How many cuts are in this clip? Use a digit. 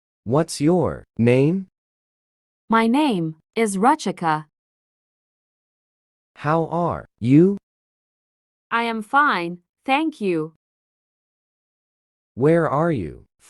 1